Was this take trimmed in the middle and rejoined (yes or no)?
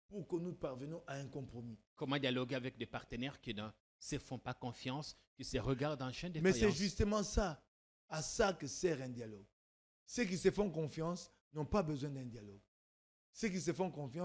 no